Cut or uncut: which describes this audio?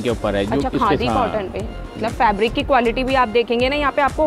cut